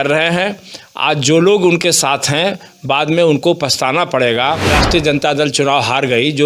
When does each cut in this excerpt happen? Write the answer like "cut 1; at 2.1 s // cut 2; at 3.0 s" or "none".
cut 1; at 4.6 s